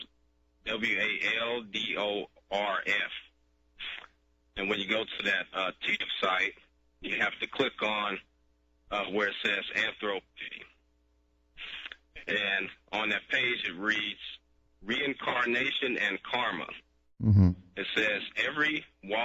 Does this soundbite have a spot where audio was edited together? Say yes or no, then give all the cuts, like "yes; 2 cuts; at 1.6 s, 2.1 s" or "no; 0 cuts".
yes; 1 cut; at 17.5 s